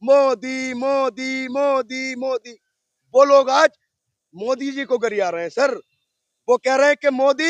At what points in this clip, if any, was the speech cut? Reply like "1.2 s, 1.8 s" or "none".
none

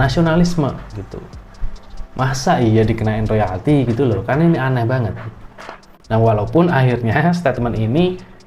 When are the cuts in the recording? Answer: none

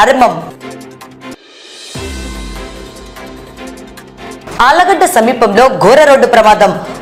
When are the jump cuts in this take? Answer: none

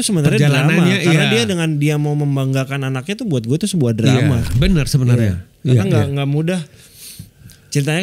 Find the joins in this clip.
none

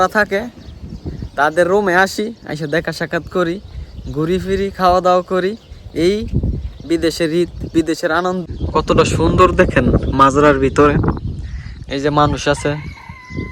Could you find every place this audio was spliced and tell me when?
8.5 s

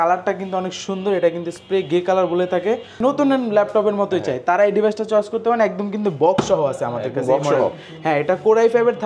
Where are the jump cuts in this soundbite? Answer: 3.0 s

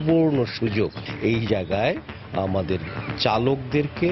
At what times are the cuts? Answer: 1.0 s

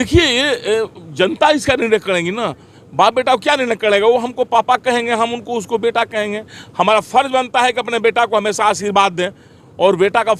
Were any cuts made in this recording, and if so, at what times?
none

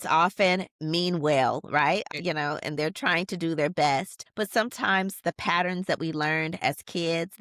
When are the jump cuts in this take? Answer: 2.1 s, 4.2 s

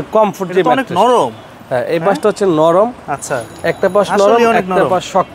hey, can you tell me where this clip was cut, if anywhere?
none

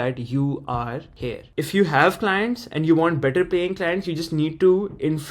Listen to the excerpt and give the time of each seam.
1.5 s

